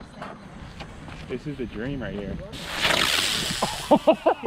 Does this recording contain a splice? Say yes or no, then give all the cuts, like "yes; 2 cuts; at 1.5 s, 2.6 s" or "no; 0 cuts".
yes; 2 cuts; at 1.3 s, 2.6 s